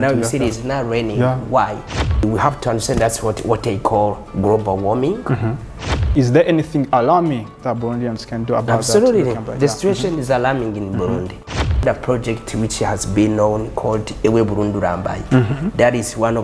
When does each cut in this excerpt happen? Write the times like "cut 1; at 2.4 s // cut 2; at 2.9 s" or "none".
cut 1; at 2.2 s // cut 2; at 6.1 s // cut 3; at 11.8 s